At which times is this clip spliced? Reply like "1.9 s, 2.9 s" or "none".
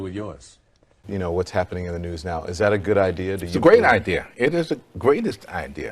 1.0 s